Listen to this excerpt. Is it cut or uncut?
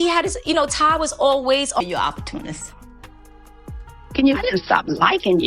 cut